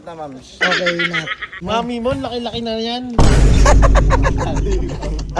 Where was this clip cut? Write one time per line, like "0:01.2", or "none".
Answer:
0:01.4

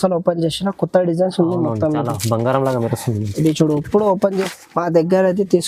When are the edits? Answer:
0:04.5

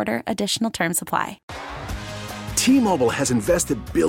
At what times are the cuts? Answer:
0:01.5

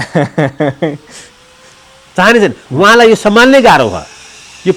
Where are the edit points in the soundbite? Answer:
none

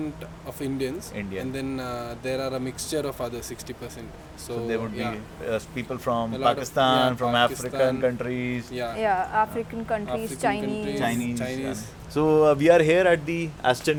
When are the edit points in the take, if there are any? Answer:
none

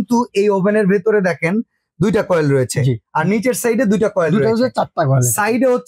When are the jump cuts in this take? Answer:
none

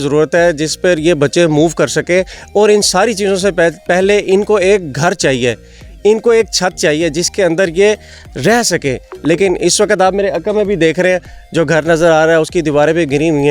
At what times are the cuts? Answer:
none

